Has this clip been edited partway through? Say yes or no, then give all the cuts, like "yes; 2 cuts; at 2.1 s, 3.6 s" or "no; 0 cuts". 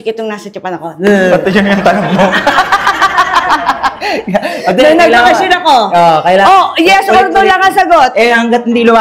no; 0 cuts